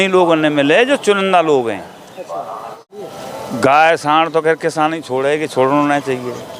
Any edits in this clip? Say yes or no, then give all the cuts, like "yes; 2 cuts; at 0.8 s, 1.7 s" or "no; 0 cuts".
yes; 1 cut; at 3.0 s